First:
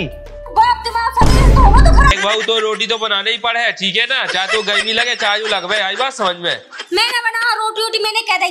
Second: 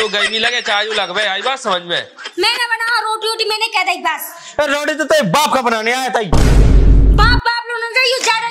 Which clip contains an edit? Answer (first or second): first